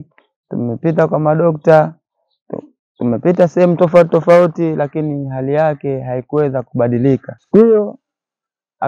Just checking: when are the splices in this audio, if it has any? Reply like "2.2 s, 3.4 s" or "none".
7.3 s